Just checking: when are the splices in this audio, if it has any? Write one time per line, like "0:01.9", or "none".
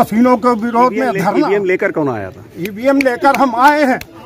0:01.3